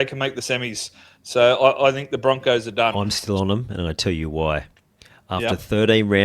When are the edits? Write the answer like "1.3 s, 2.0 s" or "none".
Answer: 2.9 s